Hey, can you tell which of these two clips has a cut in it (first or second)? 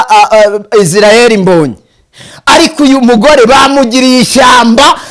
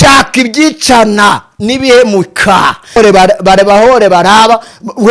second